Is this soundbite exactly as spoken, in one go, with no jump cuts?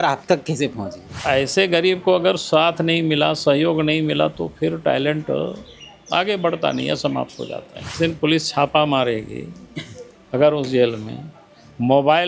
no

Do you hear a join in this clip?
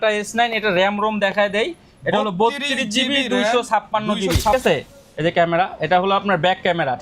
yes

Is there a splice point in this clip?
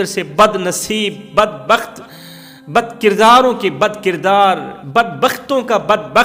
no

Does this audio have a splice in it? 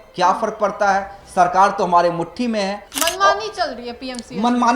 yes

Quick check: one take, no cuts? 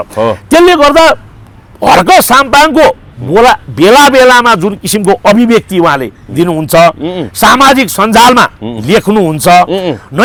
yes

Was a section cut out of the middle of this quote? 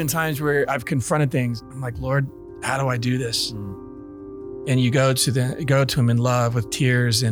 yes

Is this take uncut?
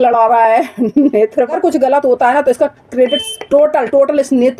no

